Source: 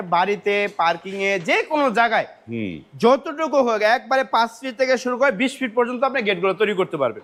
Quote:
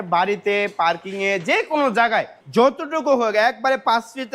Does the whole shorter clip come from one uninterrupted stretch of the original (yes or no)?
no